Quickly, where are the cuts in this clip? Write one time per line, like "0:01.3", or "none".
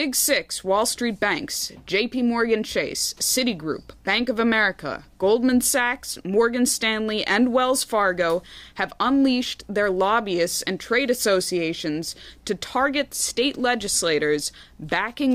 none